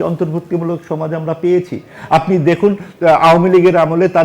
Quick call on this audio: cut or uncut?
uncut